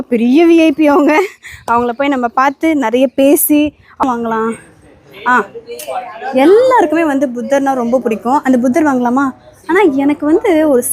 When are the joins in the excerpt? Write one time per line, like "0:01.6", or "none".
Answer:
0:04.0